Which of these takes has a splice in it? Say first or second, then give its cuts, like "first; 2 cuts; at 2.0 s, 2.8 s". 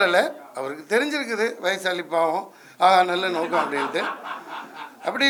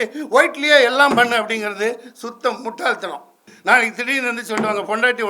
second; 1 cut; at 3.5 s